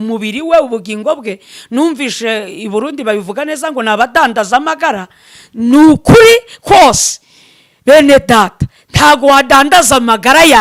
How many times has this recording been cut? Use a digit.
0